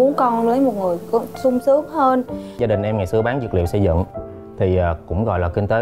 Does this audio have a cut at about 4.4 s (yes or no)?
no